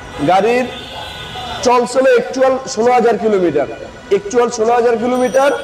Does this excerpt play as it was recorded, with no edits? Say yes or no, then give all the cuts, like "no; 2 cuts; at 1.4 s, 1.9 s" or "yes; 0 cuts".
yes; 0 cuts